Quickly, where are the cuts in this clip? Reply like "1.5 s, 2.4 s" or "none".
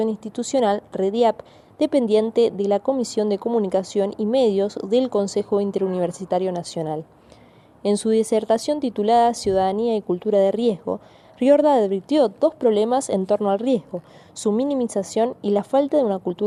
none